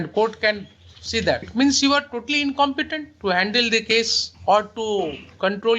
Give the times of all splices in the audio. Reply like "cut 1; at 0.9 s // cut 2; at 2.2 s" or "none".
cut 1; at 1.5 s // cut 2; at 3.0 s // cut 3; at 4.2 s